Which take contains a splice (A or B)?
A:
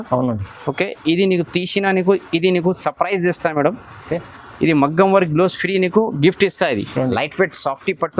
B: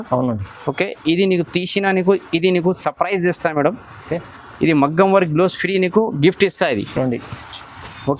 A